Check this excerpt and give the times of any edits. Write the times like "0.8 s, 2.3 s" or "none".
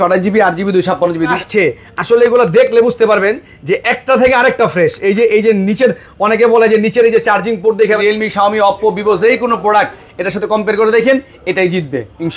1.3 s, 8.0 s